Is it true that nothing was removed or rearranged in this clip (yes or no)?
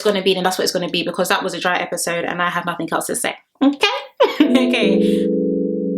no